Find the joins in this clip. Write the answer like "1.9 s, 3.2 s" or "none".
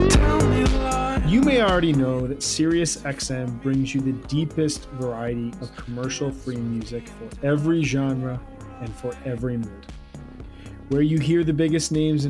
1.2 s